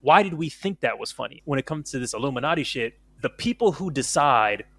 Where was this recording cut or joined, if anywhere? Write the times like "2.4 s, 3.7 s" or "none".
1.3 s, 3.0 s